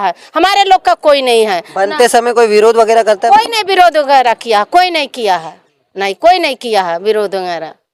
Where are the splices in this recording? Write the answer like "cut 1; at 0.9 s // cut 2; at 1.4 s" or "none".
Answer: none